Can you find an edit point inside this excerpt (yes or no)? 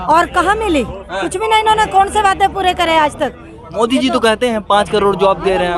no